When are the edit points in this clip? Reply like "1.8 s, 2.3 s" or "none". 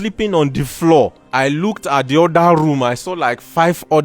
1.2 s